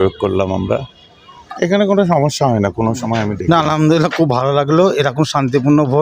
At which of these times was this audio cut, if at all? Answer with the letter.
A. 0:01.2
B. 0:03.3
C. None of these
B